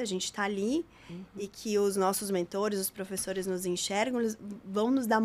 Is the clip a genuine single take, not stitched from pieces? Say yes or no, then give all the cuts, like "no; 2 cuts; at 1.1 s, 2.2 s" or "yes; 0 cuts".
yes; 0 cuts